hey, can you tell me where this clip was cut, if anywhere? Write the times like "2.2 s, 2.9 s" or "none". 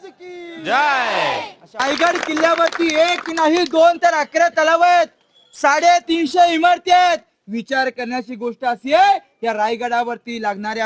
1.8 s